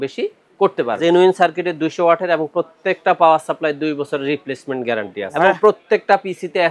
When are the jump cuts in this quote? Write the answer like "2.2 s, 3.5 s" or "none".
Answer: 1.0 s, 5.3 s